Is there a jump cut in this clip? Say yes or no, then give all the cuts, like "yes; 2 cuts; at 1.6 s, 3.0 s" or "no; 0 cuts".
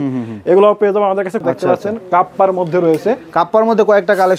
yes; 1 cut; at 1.4 s